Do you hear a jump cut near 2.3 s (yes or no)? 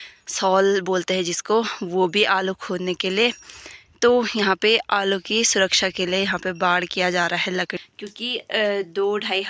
no